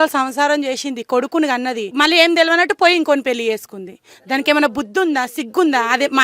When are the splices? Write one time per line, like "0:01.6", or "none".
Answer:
0:01.9